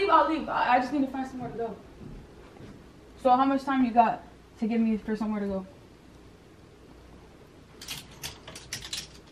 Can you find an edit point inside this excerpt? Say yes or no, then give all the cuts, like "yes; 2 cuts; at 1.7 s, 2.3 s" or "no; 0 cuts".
no; 0 cuts